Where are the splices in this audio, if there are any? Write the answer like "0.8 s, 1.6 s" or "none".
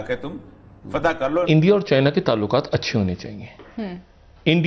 1.5 s